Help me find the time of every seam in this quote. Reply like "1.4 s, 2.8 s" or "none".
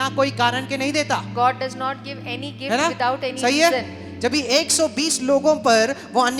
none